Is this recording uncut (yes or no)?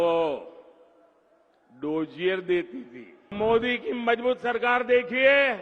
no